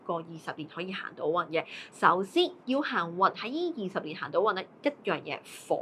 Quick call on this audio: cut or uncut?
uncut